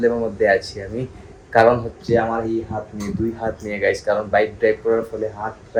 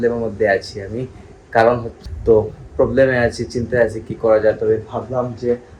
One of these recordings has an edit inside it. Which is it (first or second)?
second